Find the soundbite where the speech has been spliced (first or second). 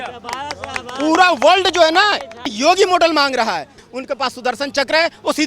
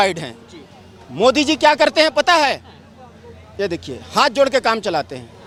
first